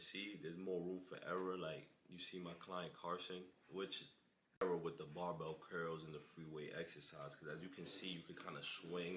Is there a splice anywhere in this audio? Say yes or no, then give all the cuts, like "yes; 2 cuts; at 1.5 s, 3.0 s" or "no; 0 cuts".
yes; 1 cut; at 4.6 s